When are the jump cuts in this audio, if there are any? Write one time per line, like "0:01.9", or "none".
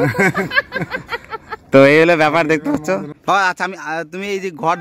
0:03.1

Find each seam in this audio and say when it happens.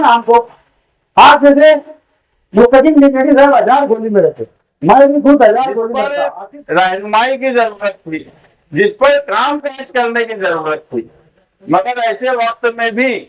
0:06.1

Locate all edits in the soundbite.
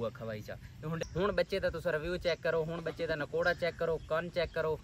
0:01.0

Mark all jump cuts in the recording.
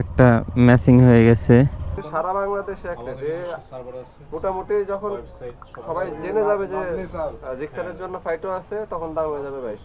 0:02.0

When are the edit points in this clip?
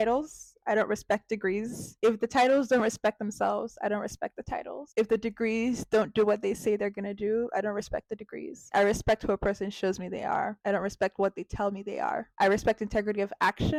none

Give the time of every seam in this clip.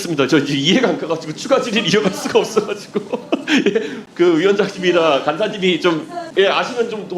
0:04.0
0:06.2

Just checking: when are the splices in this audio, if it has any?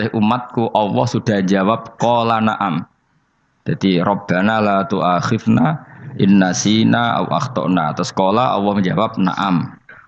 none

